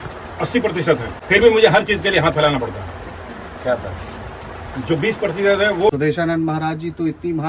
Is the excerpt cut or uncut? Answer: cut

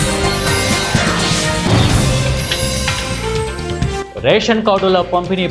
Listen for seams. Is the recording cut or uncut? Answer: uncut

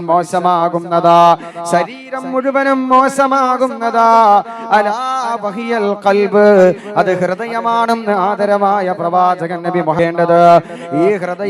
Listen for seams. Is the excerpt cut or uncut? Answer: cut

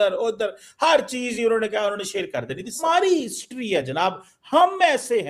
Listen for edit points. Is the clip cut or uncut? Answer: cut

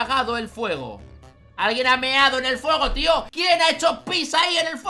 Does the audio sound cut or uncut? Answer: cut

